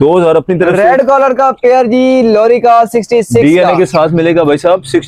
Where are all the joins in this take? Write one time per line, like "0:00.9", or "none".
none